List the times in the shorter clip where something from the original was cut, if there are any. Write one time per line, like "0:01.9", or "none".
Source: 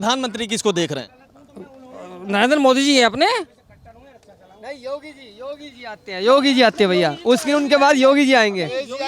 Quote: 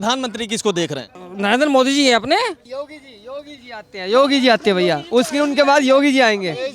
0:01.2
0:02.6